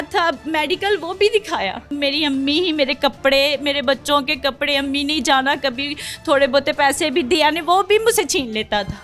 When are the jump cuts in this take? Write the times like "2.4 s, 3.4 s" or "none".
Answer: 1.9 s